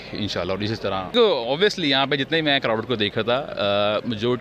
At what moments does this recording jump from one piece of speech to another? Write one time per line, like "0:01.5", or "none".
0:01.1